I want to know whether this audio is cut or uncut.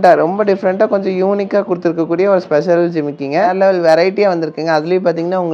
cut